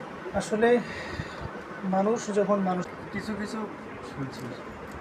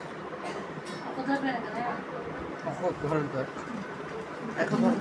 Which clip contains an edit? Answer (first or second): first